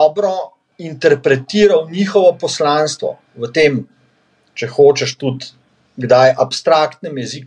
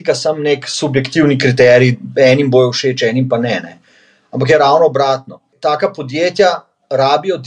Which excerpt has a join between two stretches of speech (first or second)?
second